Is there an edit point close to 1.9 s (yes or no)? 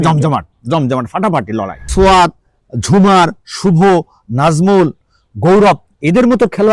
yes